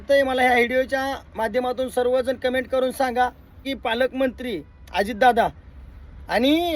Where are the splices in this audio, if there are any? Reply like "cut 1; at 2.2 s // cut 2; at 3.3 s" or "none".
cut 1; at 3.7 s